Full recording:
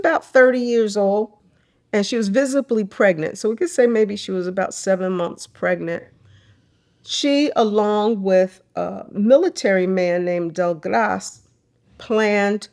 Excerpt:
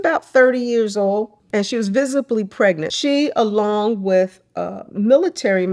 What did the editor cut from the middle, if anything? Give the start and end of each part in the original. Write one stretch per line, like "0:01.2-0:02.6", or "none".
0:01.4-0:01.8
0:03.3-0:07.1